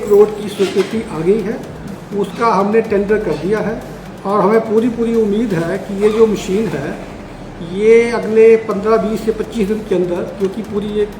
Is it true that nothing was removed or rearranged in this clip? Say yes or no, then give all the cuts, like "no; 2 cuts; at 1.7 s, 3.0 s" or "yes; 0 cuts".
yes; 0 cuts